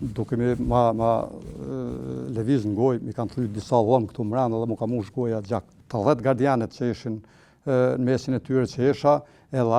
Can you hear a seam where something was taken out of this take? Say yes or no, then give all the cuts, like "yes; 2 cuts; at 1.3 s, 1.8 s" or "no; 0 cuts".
yes; 1 cut; at 5.8 s